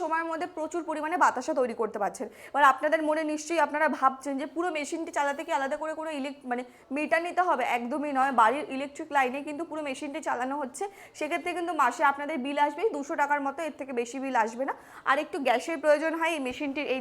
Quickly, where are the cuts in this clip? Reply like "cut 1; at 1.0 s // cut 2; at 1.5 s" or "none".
none